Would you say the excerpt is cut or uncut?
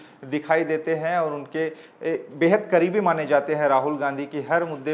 uncut